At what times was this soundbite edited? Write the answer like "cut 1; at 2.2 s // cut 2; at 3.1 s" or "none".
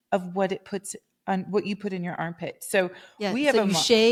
none